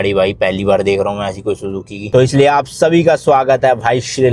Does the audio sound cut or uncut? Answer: cut